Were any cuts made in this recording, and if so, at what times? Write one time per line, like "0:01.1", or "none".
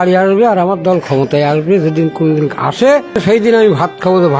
0:03.2